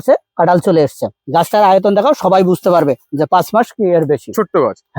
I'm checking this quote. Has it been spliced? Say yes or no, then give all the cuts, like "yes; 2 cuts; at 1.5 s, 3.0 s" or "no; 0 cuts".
no; 0 cuts